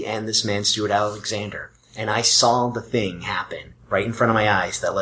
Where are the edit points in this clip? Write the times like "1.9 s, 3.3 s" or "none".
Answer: none